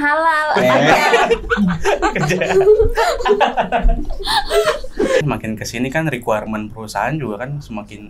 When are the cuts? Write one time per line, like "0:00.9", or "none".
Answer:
0:05.2